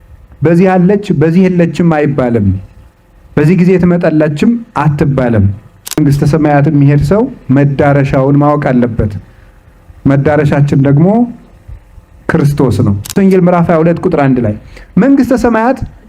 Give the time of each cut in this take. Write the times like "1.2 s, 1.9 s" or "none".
6.0 s, 13.1 s